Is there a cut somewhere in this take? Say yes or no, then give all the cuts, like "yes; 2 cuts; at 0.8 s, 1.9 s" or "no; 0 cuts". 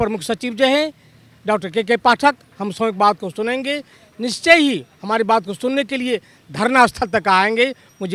no; 0 cuts